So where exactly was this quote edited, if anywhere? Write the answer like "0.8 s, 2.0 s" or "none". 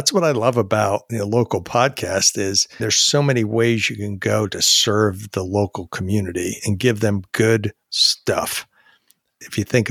1.1 s, 2.7 s

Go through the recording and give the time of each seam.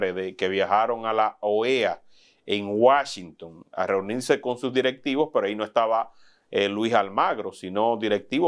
none

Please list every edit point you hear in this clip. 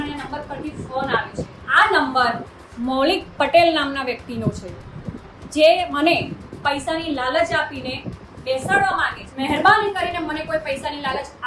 1.6 s, 9.2 s

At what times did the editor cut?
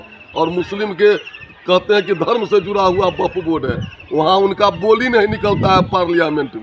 none

